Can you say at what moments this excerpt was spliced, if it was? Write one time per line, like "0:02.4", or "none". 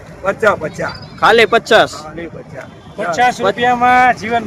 none